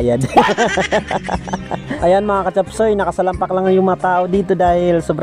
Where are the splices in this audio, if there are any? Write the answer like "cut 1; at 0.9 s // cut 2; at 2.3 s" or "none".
cut 1; at 1.8 s